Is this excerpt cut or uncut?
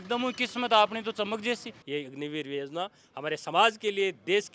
cut